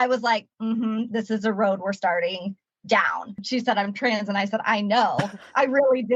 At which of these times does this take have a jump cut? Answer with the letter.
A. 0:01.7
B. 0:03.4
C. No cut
B